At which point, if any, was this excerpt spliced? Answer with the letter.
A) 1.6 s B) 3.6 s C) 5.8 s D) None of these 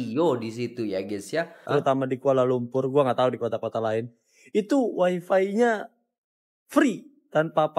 A